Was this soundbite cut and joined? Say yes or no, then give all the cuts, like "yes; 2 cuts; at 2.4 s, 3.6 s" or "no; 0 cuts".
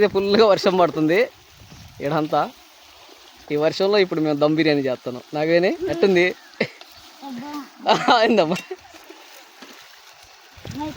no; 0 cuts